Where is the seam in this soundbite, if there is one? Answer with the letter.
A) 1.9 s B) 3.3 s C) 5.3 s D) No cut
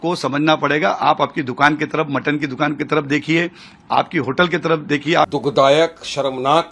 C